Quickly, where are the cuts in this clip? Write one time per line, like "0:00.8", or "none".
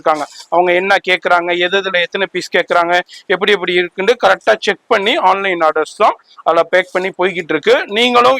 none